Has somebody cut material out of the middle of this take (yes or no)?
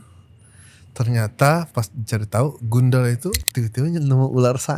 yes